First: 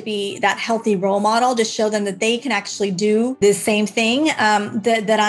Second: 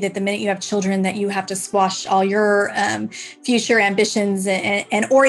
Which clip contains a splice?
first; 1 cut; at 3.3 s

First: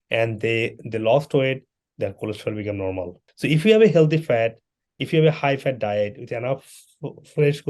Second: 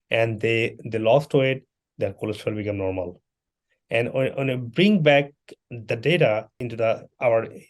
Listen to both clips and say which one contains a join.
first; 1 cut; at 3.2 s

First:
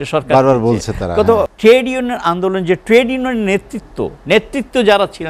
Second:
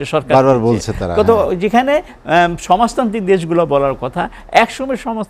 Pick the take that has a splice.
first; 1 cut; at 1.5 s

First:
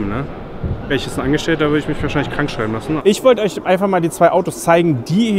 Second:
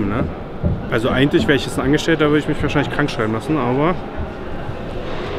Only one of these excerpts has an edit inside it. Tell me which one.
first; 2 cuts; at 0.9 s, 3.0 s

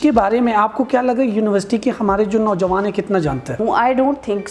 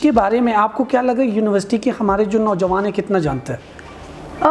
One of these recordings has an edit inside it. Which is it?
first; 1 cut; at 3.5 s

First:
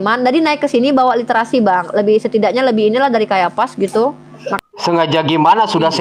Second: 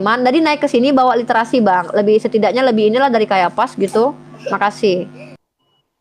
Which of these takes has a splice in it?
first; 1 cut; at 4.6 s

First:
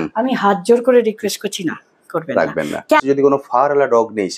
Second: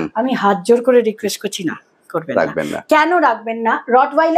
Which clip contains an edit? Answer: first; 1 cut; at 3.0 s

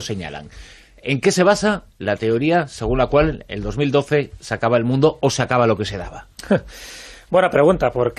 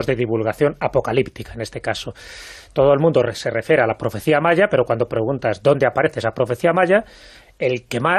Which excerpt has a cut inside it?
second; 1 cut; at 6.1 s

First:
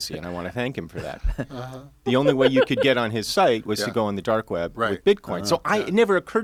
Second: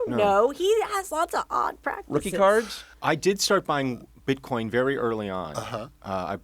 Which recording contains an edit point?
second; 1 cut; at 2.8 s

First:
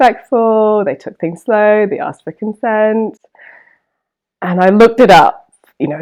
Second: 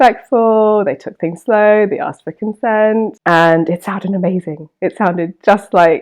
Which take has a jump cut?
second; 1 cut; at 3.2 s

